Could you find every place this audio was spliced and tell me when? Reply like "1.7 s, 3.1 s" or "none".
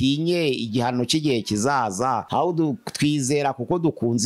2.2 s